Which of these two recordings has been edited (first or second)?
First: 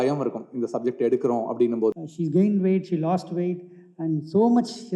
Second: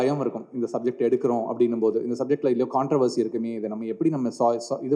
first